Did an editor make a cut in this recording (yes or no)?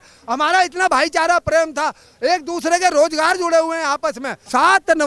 no